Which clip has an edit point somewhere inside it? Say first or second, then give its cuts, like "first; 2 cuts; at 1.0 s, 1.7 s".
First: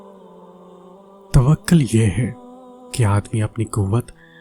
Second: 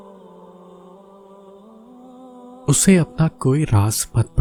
first; 1 cut; at 1.3 s